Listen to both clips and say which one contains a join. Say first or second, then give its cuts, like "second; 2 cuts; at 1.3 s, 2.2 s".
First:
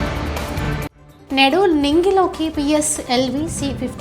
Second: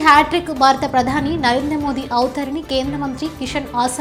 first; 1 cut; at 1.1 s